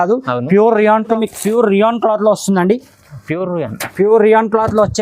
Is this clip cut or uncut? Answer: cut